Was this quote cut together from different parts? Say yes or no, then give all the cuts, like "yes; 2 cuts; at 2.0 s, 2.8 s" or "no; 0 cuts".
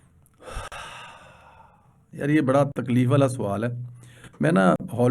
no; 0 cuts